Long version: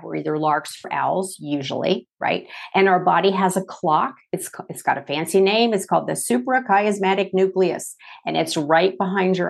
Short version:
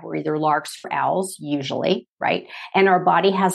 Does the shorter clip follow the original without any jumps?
yes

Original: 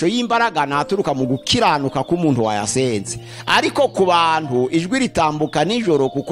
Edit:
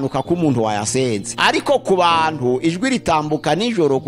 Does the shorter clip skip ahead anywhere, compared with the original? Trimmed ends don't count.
yes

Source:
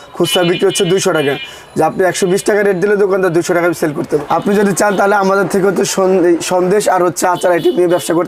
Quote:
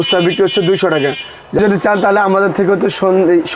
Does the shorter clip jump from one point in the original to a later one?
yes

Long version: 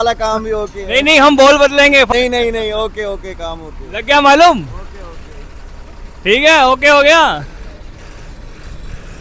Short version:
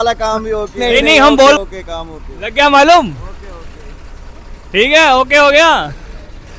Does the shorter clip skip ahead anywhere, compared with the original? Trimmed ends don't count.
yes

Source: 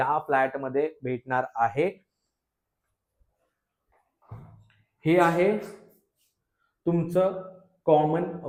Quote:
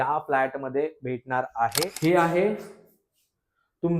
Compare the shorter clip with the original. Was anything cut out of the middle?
yes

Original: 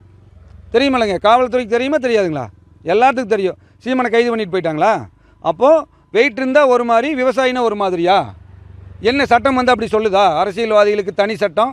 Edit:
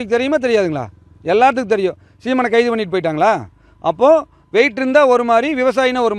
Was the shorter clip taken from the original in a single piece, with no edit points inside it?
yes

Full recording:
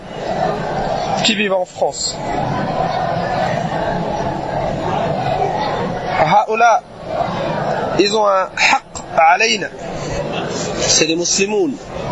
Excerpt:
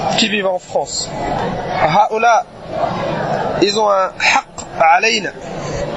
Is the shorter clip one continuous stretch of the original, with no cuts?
no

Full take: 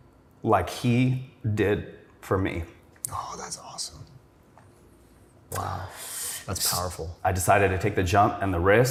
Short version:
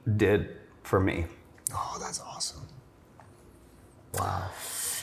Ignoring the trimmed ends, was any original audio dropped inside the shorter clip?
no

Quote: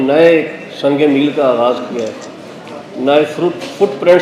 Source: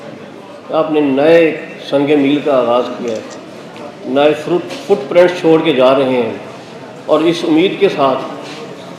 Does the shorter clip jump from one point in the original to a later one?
no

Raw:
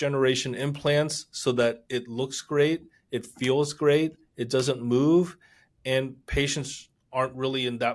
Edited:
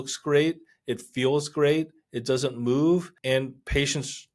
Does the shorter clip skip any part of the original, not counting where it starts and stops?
yes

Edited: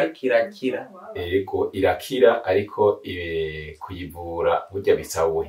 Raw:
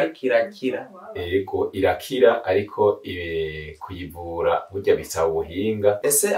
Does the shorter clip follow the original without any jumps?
yes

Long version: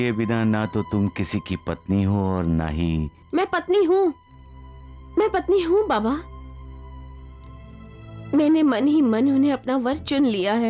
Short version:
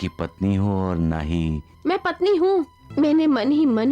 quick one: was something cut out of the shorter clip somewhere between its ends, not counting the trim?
yes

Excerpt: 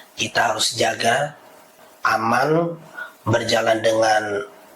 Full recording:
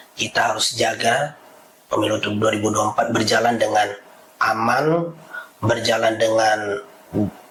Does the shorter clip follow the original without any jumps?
no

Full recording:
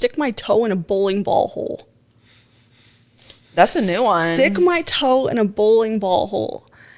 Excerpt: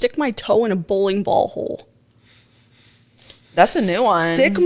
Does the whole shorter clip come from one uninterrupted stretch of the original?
yes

